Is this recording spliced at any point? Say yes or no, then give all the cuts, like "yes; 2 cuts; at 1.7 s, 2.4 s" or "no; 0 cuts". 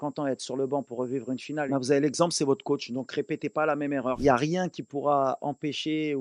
yes; 2 cuts; at 1.7 s, 4.2 s